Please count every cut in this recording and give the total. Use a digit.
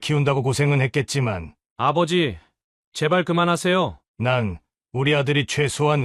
1